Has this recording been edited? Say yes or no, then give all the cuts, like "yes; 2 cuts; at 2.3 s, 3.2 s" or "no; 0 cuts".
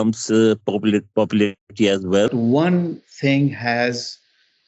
yes; 1 cut; at 2.3 s